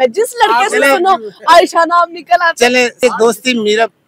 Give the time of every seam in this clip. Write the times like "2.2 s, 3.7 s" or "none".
3.0 s

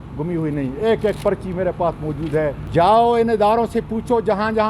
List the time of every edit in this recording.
2.6 s

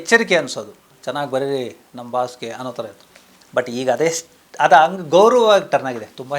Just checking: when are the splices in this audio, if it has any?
none

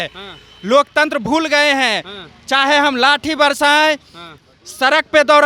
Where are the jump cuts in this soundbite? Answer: none

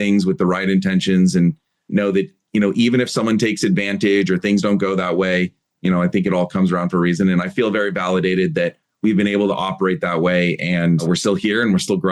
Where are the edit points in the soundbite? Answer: none

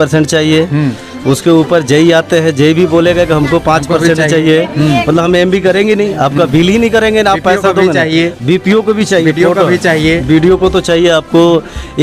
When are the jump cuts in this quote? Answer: none

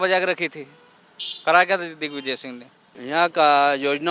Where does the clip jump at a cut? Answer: 2.9 s

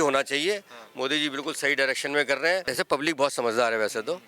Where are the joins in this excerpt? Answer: 2.7 s

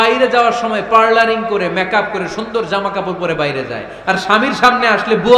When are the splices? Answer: none

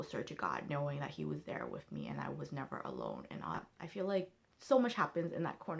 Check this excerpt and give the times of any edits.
3.8 s

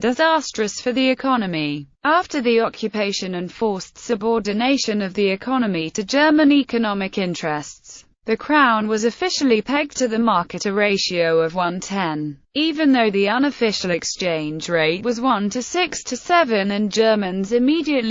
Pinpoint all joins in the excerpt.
none

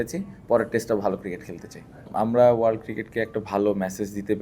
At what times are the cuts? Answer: 2.1 s

